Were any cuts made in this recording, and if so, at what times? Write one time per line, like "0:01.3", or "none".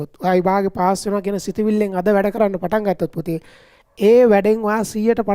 none